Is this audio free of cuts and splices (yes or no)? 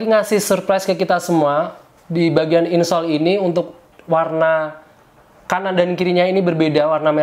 yes